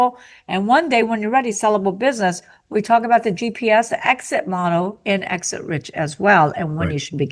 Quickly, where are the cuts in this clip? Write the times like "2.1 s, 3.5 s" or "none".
none